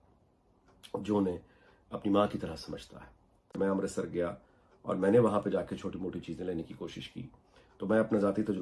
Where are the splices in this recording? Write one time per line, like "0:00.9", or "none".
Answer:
0:03.6